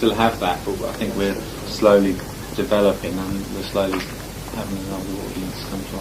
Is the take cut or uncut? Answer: cut